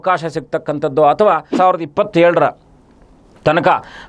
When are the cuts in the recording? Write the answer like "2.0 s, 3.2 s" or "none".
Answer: 1.5 s